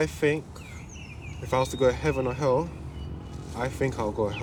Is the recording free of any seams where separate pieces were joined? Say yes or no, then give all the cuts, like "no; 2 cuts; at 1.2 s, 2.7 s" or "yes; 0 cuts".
yes; 0 cuts